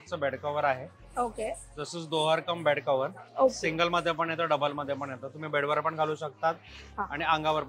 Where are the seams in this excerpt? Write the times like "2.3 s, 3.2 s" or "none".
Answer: none